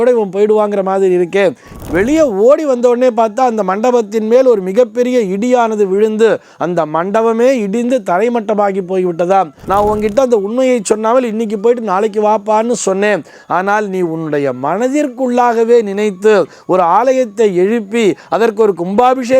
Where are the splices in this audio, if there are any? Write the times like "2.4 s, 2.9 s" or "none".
1.8 s, 9.6 s